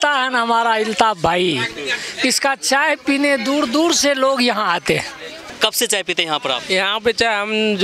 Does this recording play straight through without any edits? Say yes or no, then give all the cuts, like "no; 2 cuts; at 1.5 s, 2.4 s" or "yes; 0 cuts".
no; 1 cut; at 5.4 s